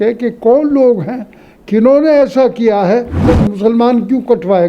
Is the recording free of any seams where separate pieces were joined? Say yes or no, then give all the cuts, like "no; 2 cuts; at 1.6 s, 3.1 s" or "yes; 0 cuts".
no; 1 cut; at 3.2 s